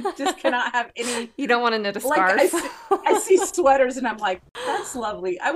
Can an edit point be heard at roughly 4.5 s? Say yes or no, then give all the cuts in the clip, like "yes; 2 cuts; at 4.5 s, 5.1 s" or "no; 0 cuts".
yes; 1 cut; at 4.5 s